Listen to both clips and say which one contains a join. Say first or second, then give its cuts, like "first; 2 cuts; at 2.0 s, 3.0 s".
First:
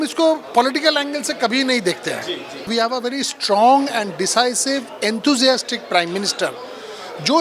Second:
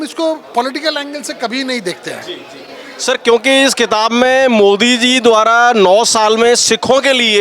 first; 1 cut; at 2.7 s